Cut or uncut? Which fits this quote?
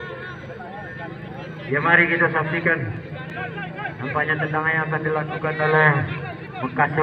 uncut